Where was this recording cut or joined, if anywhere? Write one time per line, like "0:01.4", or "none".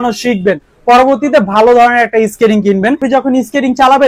0:03.0